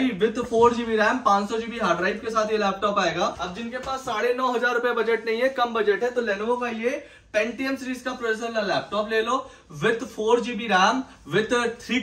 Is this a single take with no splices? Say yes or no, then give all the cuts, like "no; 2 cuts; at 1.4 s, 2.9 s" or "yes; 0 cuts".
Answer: no; 1 cut; at 3.3 s